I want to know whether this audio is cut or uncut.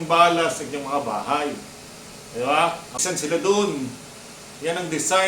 cut